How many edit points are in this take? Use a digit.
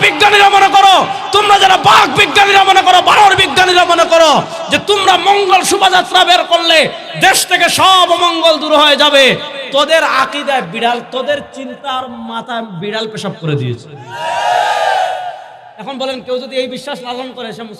0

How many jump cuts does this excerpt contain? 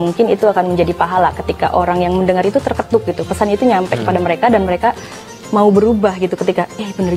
0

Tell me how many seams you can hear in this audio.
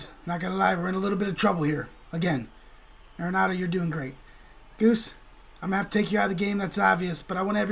0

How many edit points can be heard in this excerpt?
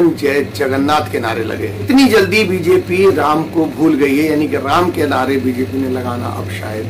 0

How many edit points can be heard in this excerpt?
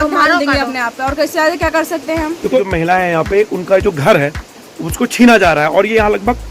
1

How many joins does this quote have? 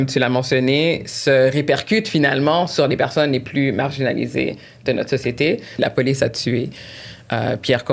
1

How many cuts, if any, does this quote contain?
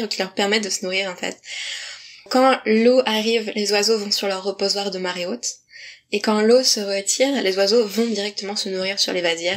0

